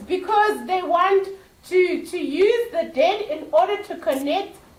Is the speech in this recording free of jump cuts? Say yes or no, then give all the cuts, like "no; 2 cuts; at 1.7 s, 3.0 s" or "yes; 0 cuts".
yes; 0 cuts